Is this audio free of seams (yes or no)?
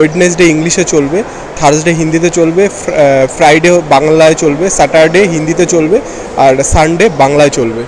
yes